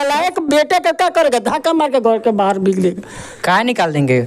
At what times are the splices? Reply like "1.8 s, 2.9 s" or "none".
none